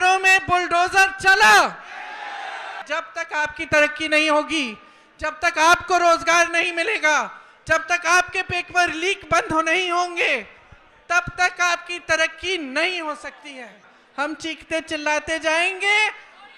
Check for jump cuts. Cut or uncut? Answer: cut